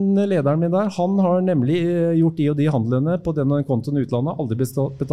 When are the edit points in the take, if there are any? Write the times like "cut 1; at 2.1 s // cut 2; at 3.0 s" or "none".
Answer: none